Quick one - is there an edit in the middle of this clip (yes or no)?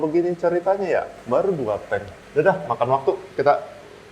yes